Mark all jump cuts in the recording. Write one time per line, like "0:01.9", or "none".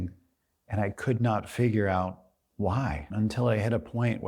0:03.0